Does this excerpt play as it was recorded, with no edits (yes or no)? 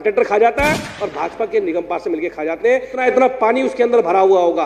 no